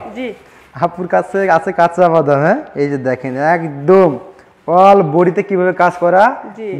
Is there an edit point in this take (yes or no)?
no